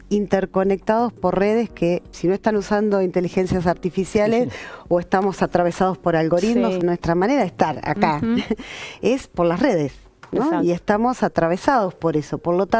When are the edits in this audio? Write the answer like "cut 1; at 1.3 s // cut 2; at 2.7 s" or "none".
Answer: cut 1; at 2.1 s // cut 2; at 6.8 s